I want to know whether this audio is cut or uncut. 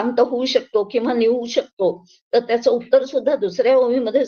uncut